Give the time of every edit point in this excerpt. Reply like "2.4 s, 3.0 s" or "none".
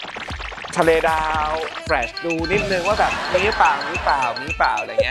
none